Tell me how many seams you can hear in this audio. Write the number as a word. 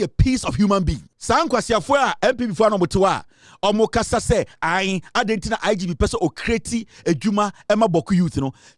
one